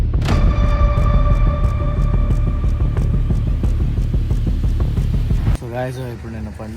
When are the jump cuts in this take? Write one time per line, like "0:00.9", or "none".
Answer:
0:05.6